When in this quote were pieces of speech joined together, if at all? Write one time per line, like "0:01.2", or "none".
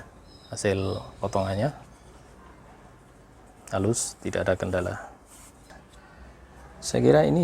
0:05.8